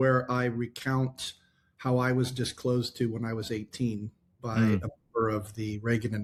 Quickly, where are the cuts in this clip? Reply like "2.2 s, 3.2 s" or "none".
none